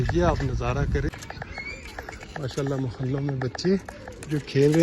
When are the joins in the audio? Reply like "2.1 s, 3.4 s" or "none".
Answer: 1.1 s